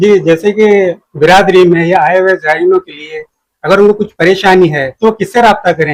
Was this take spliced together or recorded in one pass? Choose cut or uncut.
uncut